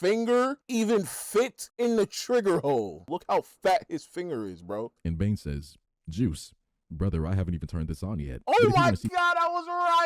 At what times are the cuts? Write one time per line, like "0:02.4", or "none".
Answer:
0:03.0
0:04.9